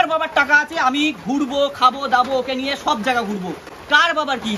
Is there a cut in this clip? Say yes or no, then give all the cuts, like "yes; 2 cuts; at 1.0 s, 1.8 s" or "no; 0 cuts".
no; 0 cuts